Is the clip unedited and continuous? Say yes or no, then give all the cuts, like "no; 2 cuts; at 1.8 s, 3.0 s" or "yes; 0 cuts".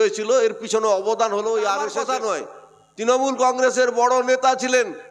no; 1 cut; at 2.0 s